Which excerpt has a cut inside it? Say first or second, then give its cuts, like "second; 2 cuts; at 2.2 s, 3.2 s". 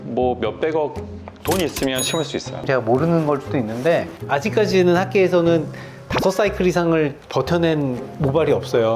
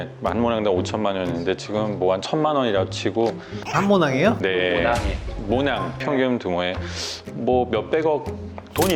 first; 1 cut; at 2.6 s